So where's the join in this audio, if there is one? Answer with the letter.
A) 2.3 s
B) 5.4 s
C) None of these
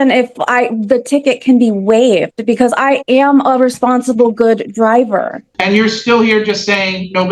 B